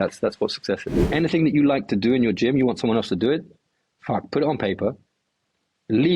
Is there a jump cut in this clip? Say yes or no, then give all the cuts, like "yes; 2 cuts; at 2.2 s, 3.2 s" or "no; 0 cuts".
yes; 1 cut; at 1.0 s